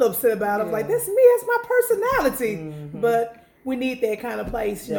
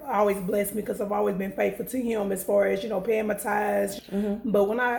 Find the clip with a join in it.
second; 1 cut; at 4.0 s

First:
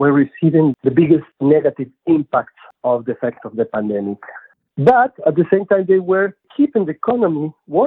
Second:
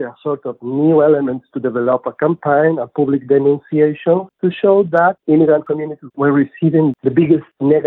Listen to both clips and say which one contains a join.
first; 1 cut; at 4.4 s

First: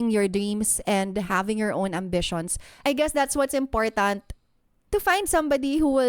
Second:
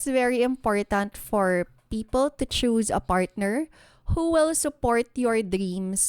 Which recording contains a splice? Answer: first; 1 cut; at 2.8 s

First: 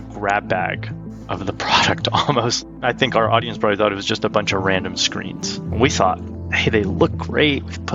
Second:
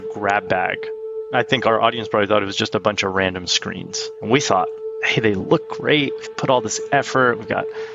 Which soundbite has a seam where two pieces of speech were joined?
second; 1 cut; at 1.2 s

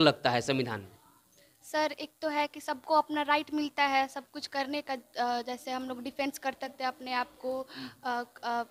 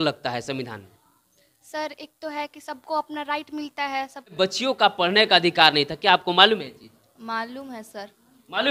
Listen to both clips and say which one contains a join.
second; 1 cut; at 4.3 s

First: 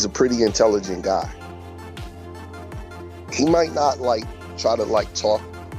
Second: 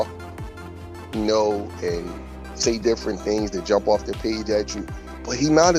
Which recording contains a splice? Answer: first; 2 cuts; at 1.3 s, 2.7 s

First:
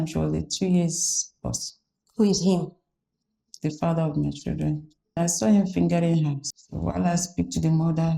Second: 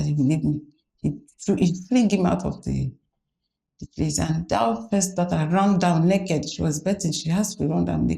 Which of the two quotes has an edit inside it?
first; 2 cuts; at 5.2 s, 6.4 s

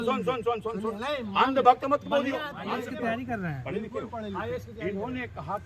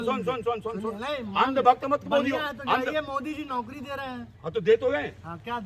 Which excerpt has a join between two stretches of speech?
first; 1 cut; at 2.5 s

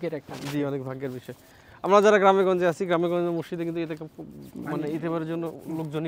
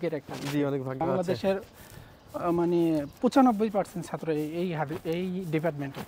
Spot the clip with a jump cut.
second; 1 cut; at 1.0 s

